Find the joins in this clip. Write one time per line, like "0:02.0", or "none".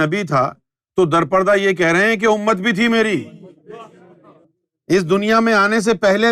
0:04.3